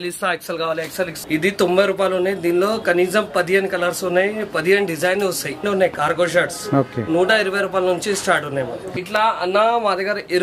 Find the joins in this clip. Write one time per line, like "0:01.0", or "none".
0:01.2
0:05.6
0:08.9